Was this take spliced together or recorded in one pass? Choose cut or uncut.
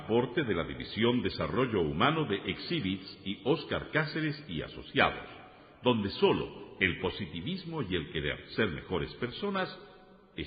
uncut